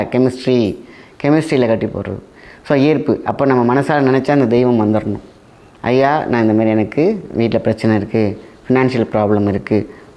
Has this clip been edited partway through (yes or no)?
no